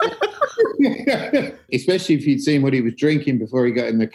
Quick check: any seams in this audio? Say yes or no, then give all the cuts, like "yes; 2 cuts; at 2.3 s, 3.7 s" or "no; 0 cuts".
yes; 1 cut; at 1.7 s